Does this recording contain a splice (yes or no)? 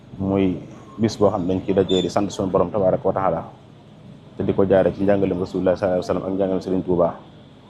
no